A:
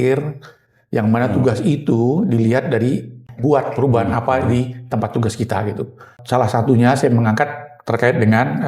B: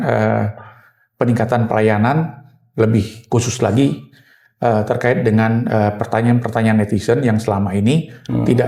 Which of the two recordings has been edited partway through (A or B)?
A